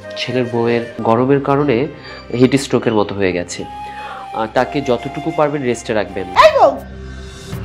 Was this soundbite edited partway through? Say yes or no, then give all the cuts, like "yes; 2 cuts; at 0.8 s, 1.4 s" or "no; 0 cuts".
yes; 2 cuts; at 1.0 s, 6.2 s